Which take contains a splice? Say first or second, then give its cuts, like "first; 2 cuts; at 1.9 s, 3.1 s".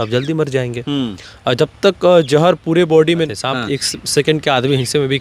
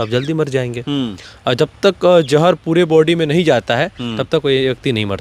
first; 1 cut; at 3.3 s